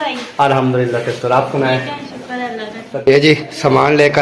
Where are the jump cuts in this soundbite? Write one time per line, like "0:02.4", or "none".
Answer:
0:03.1